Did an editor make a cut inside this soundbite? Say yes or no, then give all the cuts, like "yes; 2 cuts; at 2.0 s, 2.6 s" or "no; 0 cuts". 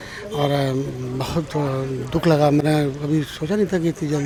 no; 0 cuts